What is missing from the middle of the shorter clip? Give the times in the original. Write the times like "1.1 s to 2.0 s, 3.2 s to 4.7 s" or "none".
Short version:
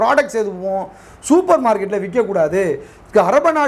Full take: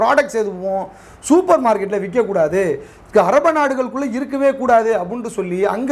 none